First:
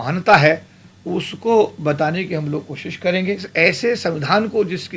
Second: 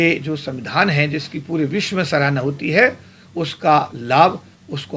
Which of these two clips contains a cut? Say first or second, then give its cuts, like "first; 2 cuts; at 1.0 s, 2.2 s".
first; 1 cut; at 3.5 s